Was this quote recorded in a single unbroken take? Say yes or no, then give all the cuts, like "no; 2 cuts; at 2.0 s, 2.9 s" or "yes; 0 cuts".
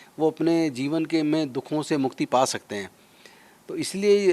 yes; 0 cuts